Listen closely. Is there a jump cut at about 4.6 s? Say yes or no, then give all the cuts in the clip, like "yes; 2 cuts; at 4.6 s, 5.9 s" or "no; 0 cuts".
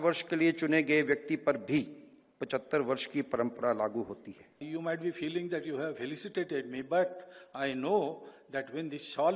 yes; 1 cut; at 4.6 s